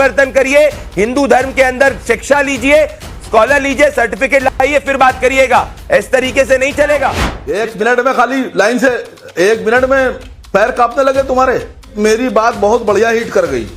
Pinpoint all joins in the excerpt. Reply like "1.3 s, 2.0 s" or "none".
7.3 s, 10.3 s, 11.9 s

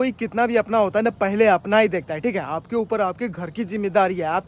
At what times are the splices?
none

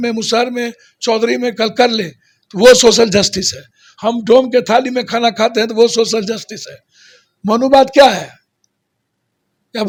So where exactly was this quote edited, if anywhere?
none

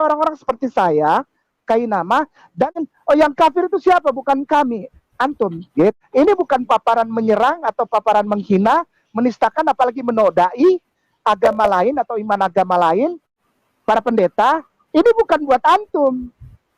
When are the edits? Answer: 2.9 s, 6.0 s, 13.3 s

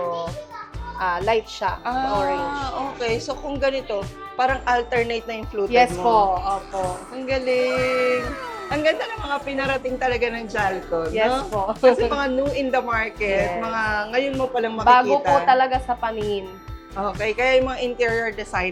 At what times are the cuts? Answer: none

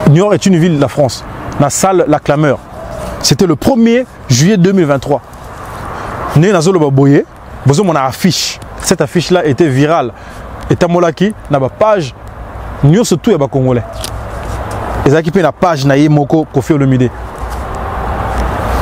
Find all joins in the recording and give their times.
none

